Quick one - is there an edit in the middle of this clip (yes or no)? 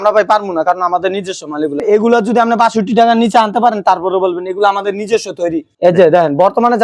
yes